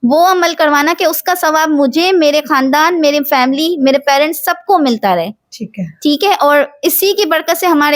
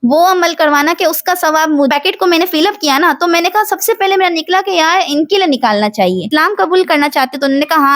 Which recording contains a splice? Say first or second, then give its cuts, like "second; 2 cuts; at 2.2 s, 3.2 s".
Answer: second; 2 cuts; at 1.9 s, 6.2 s